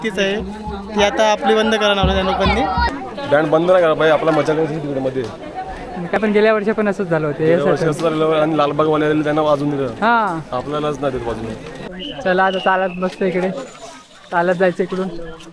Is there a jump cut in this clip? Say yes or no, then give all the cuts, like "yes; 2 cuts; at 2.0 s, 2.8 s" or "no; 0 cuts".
yes; 3 cuts; at 2.9 s, 6.2 s, 11.9 s